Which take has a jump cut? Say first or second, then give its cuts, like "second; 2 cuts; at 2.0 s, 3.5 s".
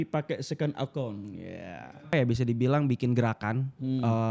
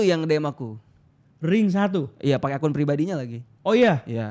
first; 1 cut; at 2.1 s